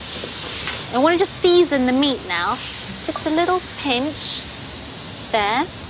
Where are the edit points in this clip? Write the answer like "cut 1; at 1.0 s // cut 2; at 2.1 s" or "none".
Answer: none

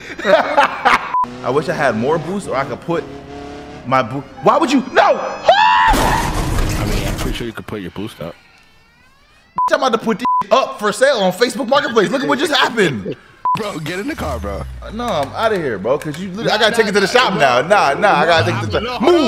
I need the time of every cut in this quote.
cut 1; at 1.1 s // cut 2; at 13.6 s

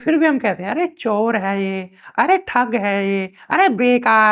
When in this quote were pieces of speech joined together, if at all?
none

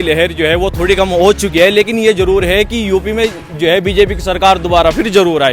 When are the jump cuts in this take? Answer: none

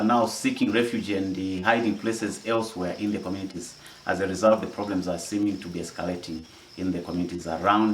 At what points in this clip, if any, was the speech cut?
none

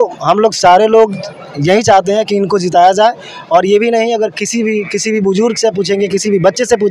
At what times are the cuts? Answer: none

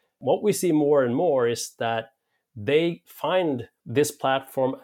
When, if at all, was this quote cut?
cut 1; at 3.7 s

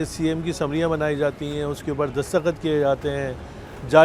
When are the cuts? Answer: none

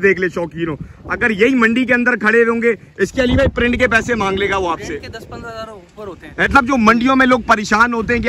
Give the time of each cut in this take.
cut 1; at 6.5 s

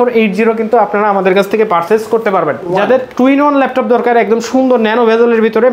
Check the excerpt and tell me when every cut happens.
cut 1; at 2.7 s

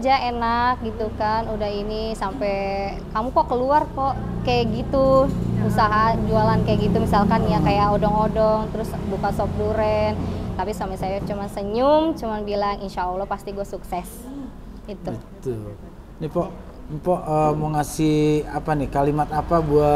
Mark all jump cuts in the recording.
none

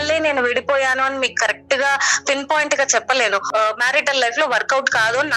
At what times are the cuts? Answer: cut 1; at 3.5 s

